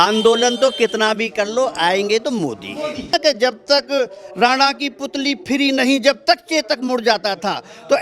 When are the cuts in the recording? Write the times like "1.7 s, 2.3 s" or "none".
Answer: 3.1 s